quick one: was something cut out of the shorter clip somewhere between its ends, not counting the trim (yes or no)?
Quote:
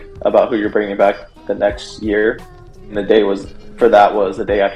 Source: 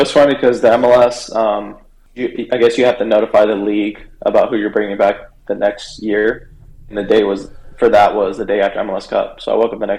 no